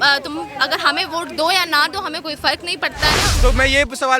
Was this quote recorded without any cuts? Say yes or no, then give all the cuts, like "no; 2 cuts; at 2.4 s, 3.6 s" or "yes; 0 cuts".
no; 1 cut; at 3.3 s